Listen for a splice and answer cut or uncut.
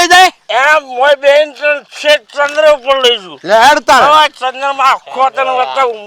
uncut